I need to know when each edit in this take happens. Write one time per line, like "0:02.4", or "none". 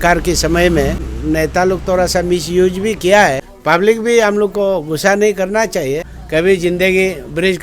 0:01.1
0:03.5
0:06.1